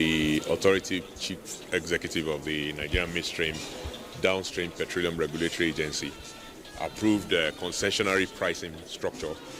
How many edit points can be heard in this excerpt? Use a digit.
1